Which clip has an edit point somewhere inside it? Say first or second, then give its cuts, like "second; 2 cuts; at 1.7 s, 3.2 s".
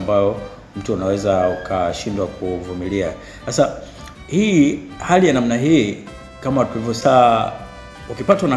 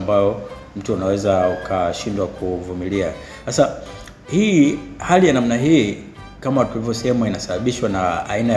first; 1 cut; at 7.0 s